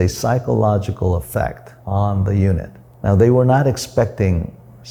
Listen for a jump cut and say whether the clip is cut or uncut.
uncut